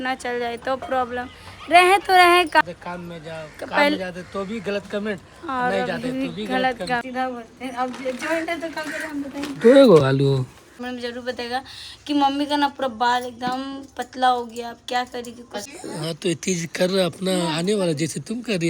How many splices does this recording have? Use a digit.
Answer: 4